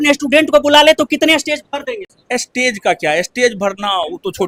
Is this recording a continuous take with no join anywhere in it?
yes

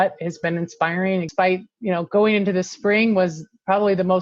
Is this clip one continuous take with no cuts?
no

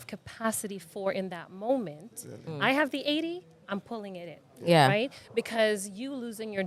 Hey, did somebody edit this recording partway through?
no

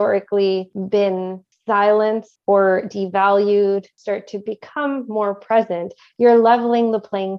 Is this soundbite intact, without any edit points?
no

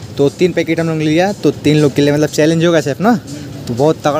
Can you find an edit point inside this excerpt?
no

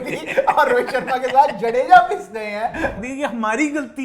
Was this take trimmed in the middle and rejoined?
yes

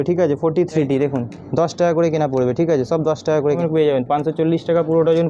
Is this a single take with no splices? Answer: no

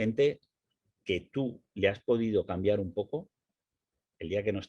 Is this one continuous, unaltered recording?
yes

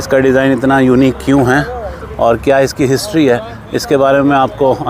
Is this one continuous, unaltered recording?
yes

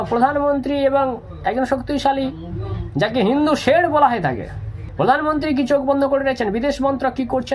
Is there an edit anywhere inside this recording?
yes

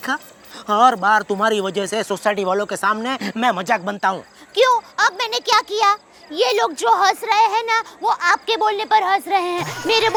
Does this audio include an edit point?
no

